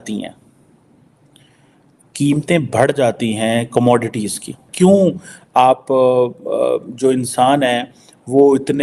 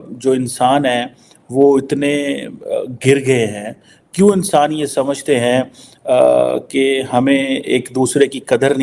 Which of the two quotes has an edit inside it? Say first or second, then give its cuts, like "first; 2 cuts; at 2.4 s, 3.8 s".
first; 1 cut; at 4.6 s